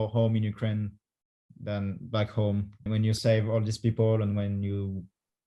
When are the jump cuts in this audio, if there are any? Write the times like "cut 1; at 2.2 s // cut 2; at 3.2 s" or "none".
none

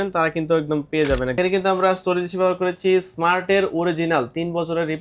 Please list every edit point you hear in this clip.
cut 1; at 1.4 s

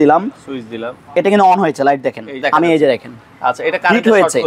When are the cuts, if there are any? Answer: cut 1; at 2.4 s

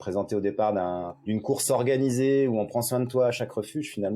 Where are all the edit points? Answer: cut 1; at 1.1 s

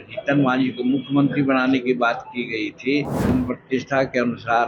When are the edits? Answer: cut 1; at 3.3 s

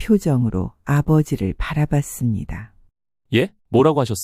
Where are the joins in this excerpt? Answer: cut 1; at 3.3 s

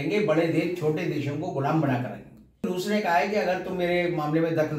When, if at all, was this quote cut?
cut 1; at 2.7 s

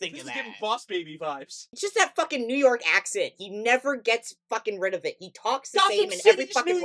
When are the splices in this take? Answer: cut 1; at 1.6 s

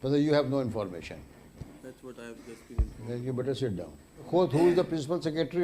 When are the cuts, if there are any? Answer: cut 1; at 4.3 s

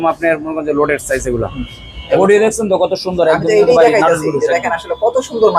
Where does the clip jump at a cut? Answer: cut 1; at 2.2 s

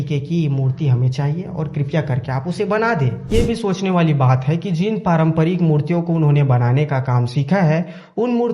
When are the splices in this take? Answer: cut 1; at 3.3 s

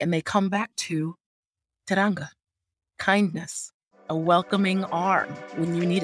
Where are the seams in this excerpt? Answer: none

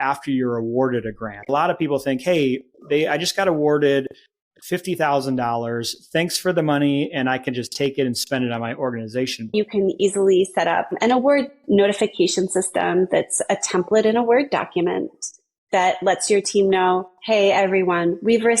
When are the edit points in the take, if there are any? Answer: cut 1; at 1.5 s // cut 2; at 9.5 s

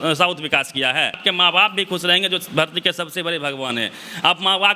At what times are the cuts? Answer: cut 1; at 1.2 s

